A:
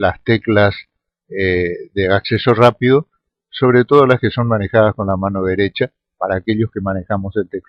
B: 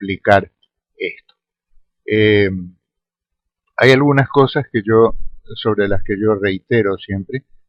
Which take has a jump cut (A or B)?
A